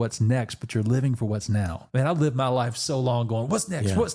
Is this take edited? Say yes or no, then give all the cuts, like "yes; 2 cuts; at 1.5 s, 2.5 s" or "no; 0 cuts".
yes; 1 cut; at 1.8 s